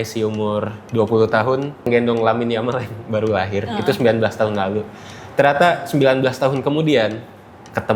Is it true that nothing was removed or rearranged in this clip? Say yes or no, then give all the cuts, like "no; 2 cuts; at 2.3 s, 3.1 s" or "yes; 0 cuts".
no; 1 cut; at 1.9 s